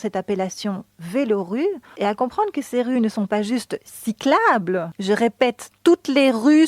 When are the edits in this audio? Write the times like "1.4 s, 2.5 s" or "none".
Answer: 1.9 s, 4.9 s